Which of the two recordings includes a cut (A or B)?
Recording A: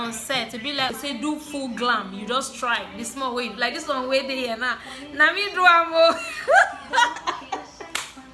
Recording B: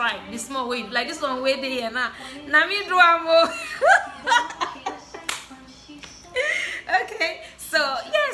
A